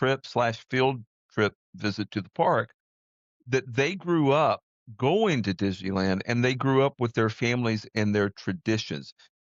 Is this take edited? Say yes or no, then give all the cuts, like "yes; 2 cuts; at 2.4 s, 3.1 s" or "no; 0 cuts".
no; 0 cuts